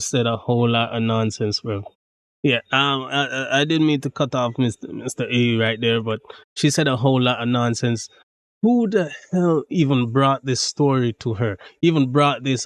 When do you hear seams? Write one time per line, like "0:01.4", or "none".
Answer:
none